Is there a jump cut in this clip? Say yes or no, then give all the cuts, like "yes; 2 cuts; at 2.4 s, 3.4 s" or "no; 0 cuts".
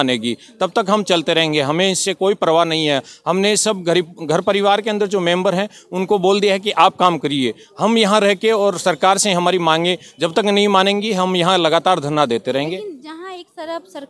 no; 0 cuts